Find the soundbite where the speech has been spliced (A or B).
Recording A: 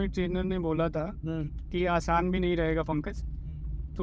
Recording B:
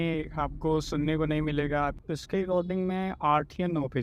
B